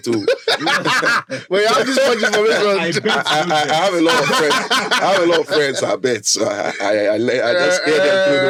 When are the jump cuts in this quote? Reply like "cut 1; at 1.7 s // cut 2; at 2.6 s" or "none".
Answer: none